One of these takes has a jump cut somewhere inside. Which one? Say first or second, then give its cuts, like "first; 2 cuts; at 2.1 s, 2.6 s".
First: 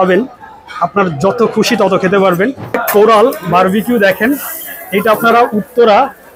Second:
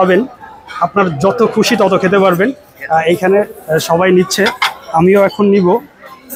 first; 1 cut; at 2.7 s